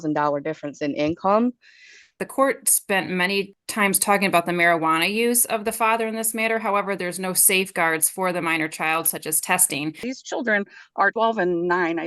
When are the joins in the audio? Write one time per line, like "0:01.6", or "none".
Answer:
0:02.2
0:03.6
0:10.1
0:11.1